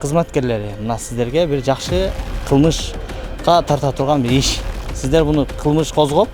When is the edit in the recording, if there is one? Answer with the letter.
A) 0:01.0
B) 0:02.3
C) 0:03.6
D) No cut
B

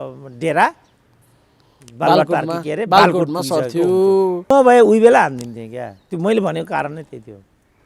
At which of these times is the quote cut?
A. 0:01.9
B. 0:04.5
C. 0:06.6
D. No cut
B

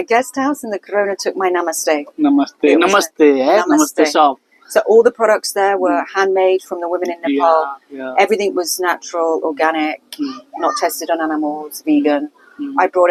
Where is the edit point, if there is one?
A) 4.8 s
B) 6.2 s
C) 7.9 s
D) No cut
D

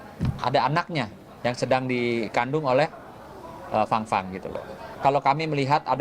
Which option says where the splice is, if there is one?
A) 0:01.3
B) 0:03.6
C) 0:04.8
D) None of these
C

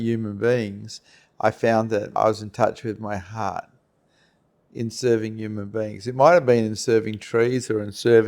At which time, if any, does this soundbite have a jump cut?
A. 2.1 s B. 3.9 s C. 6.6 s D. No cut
A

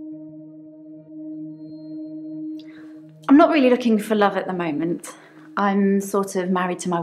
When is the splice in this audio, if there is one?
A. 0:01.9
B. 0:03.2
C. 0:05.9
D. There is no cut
B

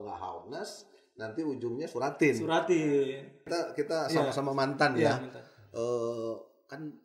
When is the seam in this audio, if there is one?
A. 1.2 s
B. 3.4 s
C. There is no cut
B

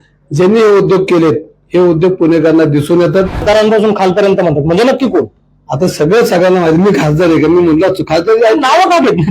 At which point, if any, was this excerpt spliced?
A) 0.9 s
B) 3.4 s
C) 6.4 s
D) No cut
B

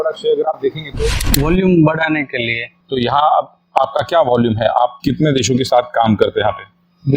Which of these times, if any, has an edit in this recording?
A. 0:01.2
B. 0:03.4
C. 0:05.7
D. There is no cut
A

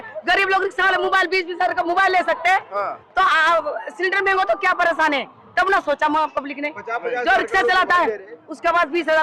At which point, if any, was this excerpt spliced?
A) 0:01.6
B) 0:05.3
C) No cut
C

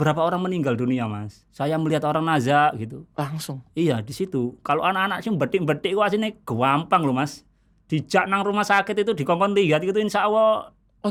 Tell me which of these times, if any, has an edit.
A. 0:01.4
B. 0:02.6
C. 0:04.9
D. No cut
D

